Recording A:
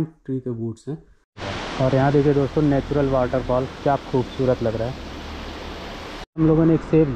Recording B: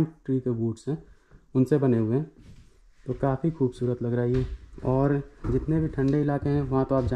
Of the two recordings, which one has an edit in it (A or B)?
A